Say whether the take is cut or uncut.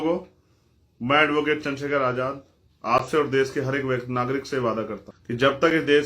cut